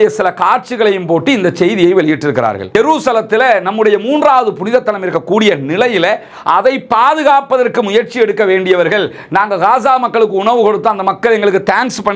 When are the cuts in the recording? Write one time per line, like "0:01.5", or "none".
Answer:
0:02.6